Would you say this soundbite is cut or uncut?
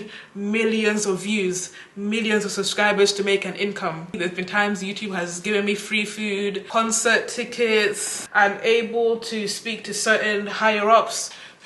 cut